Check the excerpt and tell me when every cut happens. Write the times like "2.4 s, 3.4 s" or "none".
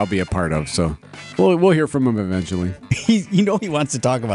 2.9 s